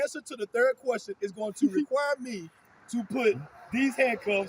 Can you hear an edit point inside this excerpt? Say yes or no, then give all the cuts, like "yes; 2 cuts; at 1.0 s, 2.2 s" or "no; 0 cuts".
no; 0 cuts